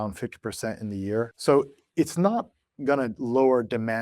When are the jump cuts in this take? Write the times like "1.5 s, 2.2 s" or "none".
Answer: 1.4 s